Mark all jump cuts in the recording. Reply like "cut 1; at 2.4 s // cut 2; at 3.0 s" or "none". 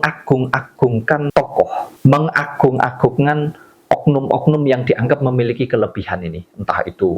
cut 1; at 1.4 s